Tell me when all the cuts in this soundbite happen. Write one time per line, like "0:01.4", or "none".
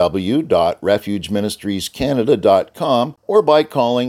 0:03.2